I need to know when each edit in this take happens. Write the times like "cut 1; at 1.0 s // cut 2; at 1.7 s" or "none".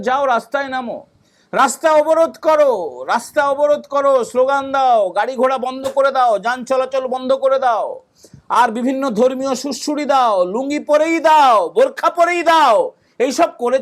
none